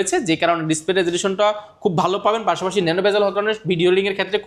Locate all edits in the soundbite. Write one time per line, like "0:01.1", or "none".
none